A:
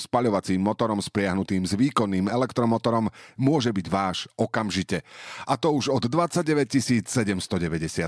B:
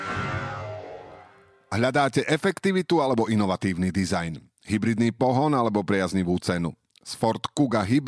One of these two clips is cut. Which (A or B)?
B